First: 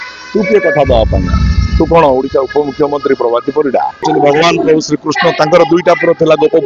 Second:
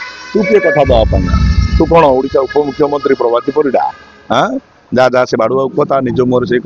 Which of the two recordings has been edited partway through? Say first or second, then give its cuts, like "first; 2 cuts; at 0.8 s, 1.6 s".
first; 1 cut; at 4.0 s